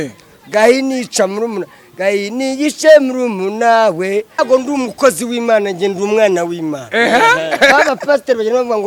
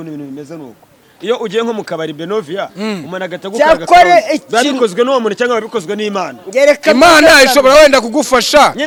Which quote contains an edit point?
first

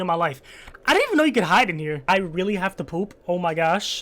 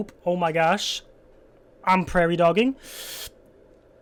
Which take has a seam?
first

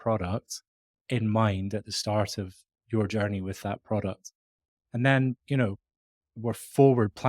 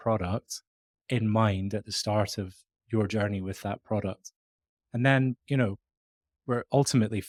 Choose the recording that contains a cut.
first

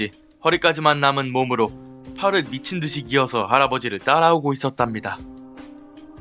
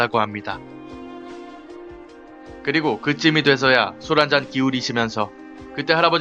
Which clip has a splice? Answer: second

